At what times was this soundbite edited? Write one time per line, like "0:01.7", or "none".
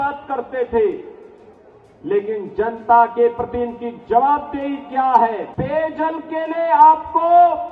0:05.5